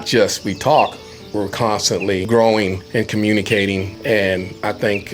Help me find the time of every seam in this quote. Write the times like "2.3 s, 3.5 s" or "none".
2.2 s, 2.8 s, 3.9 s